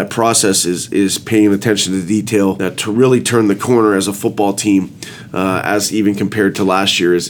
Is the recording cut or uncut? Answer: cut